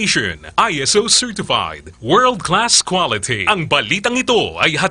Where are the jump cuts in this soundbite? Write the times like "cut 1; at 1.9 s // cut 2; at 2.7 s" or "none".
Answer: cut 1; at 3.5 s

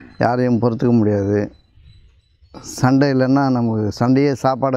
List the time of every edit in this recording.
none

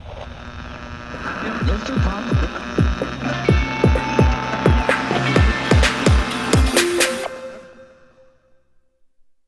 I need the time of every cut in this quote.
none

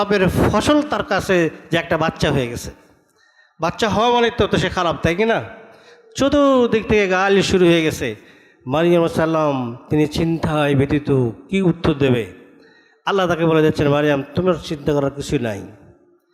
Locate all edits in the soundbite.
none

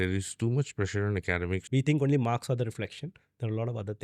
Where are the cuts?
cut 1; at 1.6 s

